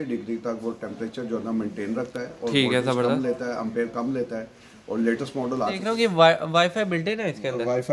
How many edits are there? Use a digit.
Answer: 1